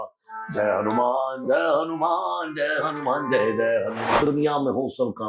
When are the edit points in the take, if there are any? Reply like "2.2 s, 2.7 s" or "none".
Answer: 4.2 s